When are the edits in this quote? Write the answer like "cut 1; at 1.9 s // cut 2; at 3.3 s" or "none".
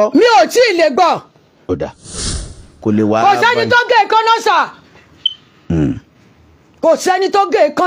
cut 1; at 2.2 s